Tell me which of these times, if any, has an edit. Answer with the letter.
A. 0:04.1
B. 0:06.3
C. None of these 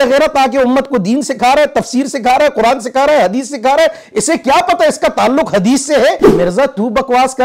B